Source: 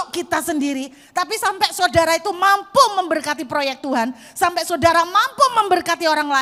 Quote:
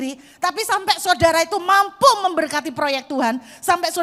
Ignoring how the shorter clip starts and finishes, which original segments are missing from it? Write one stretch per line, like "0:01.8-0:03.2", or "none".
none